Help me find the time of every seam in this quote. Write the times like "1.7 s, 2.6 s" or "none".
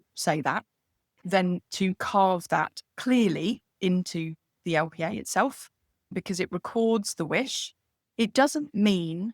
1.2 s